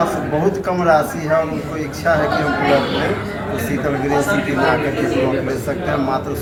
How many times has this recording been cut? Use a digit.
0